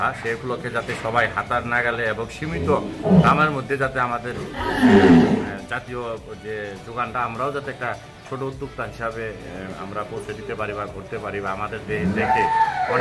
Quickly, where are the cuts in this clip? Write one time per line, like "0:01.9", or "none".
none